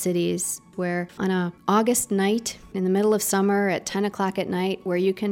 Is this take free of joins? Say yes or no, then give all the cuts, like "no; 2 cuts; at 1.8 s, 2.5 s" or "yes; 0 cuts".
no; 1 cut; at 1.3 s